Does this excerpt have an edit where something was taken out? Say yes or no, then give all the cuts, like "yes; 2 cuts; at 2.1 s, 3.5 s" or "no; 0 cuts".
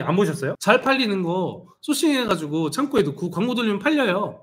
no; 0 cuts